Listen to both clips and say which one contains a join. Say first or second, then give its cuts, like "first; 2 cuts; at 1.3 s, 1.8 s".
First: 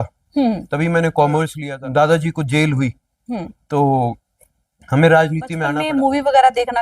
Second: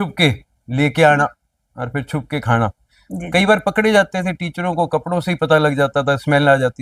first; 2 cuts; at 1.6 s, 5.7 s